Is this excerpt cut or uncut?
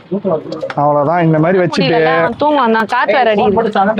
uncut